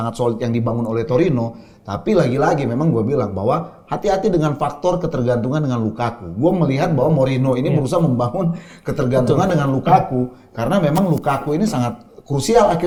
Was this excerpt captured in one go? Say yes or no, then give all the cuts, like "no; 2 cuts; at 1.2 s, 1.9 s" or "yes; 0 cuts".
yes; 0 cuts